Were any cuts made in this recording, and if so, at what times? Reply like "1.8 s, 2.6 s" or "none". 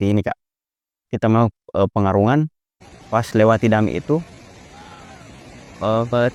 none